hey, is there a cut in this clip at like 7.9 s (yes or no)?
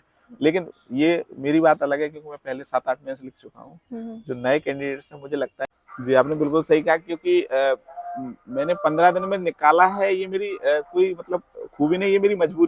no